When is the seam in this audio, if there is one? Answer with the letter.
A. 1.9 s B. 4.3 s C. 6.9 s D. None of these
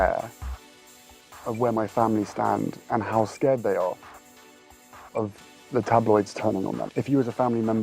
C